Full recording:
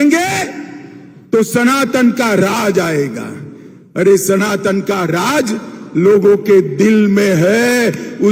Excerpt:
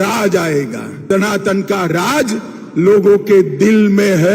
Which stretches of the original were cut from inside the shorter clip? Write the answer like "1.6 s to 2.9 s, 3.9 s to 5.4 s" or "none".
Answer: 3.5 s to 4.2 s